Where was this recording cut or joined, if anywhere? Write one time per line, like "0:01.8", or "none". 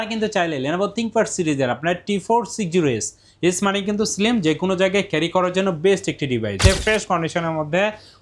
0:06.6